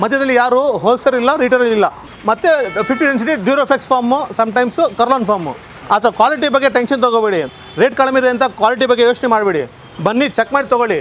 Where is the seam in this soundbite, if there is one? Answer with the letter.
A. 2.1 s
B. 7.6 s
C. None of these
A